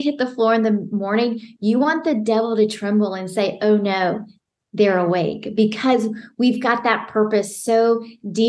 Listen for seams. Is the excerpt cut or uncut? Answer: uncut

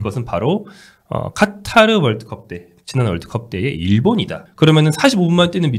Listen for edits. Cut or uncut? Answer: cut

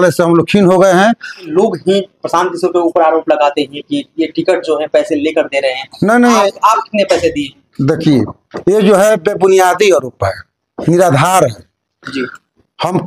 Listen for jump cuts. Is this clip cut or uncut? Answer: cut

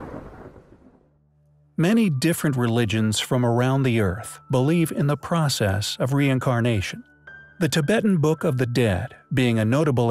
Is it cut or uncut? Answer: uncut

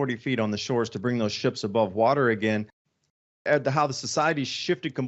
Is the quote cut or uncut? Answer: cut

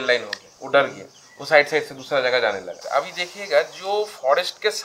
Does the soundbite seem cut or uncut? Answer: cut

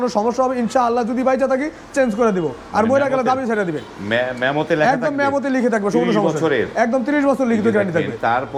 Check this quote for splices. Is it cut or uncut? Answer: uncut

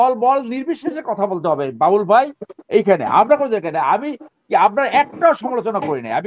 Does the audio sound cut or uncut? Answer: uncut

